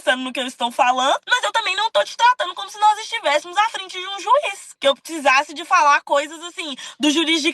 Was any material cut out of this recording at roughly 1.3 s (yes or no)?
yes